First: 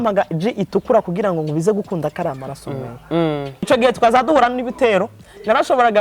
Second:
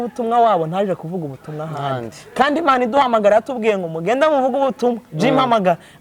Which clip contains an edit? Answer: first; 1 cut; at 3.7 s

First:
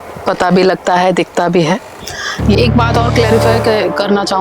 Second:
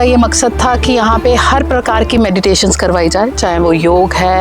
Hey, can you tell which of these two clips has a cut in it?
first; 1 cut; at 2.6 s

